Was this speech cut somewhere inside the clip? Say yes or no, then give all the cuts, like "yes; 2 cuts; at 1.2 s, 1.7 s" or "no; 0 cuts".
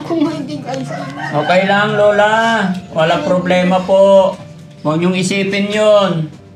no; 0 cuts